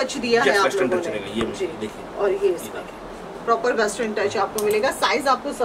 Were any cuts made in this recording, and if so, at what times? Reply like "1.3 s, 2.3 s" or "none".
none